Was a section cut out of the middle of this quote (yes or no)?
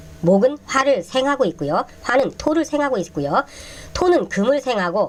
no